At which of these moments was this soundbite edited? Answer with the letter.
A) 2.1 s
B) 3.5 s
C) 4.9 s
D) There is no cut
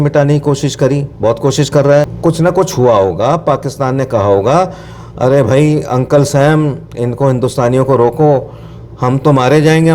A